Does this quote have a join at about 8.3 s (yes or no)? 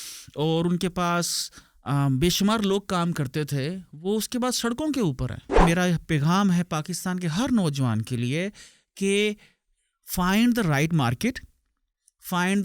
no